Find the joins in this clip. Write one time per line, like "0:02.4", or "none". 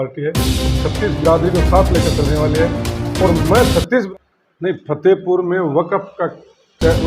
0:04.1